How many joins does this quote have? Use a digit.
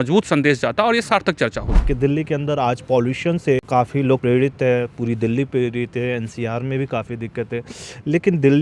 2